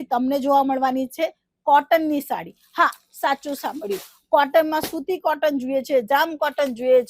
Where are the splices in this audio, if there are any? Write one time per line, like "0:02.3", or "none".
none